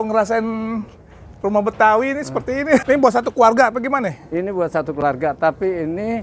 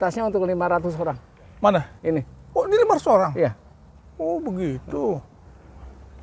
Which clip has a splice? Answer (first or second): first